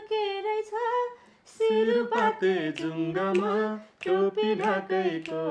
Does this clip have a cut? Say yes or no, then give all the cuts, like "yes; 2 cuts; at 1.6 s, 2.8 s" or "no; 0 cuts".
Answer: no; 0 cuts